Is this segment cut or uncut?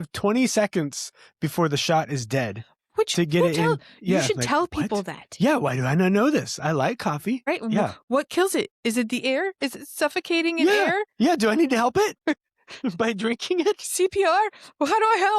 cut